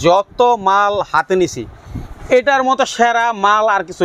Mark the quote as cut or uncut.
uncut